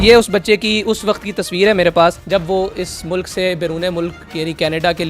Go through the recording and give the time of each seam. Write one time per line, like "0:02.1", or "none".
0:02.2

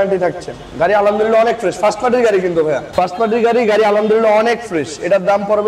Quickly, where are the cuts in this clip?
0:02.9

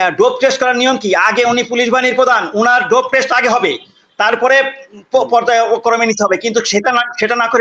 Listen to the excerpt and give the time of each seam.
none

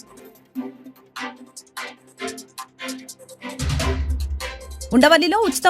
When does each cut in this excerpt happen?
0:04.7

